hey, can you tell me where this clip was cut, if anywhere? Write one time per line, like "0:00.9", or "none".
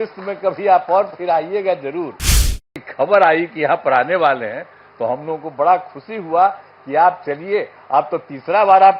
0:02.6